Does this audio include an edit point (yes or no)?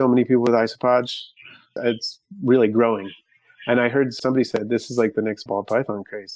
yes